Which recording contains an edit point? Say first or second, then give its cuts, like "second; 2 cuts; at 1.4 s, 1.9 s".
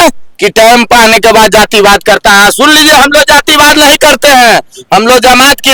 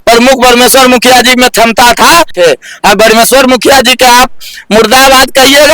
second; 1 cut; at 2.3 s